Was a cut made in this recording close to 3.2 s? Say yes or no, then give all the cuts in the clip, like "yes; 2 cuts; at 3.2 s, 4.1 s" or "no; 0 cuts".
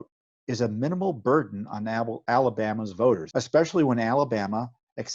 yes; 1 cut; at 3.2 s